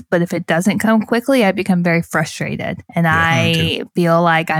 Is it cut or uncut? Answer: cut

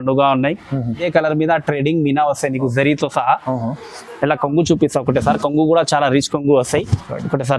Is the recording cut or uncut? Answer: cut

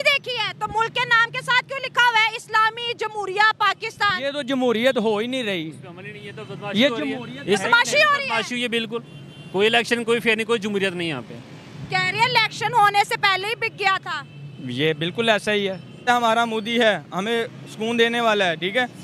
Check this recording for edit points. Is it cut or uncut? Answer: cut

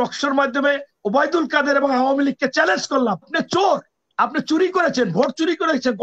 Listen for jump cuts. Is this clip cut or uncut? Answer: cut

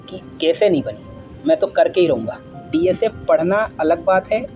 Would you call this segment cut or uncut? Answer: cut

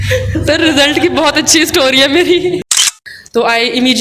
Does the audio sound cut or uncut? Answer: cut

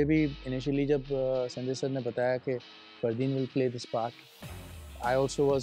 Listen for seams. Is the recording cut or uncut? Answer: uncut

